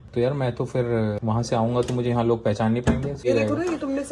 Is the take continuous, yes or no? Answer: no